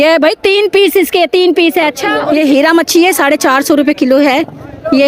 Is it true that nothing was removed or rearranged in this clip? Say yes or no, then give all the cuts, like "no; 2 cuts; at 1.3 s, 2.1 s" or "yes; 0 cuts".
no; 1 cut; at 2.1 s